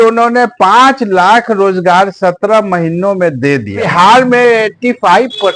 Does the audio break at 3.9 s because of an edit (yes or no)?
yes